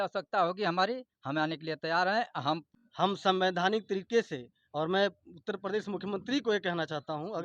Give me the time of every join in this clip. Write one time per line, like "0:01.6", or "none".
0:02.7